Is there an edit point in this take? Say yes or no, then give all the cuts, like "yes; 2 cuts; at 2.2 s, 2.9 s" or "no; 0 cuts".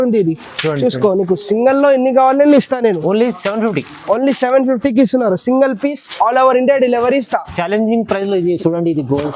no; 0 cuts